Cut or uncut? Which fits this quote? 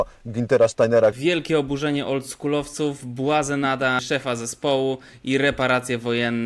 cut